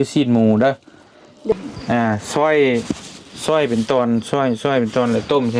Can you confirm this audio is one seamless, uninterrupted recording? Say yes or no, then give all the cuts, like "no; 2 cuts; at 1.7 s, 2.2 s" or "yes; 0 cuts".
no; 1 cut; at 1.5 s